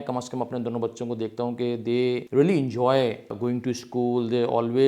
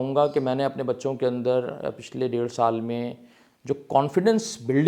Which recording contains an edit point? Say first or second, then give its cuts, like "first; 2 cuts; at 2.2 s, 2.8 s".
first; 2 cuts; at 2.2 s, 3.3 s